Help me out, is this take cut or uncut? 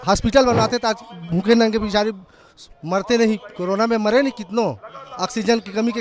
uncut